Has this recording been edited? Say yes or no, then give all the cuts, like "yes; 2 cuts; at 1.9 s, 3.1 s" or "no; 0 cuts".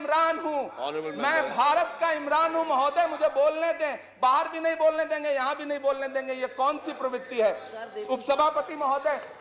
no; 0 cuts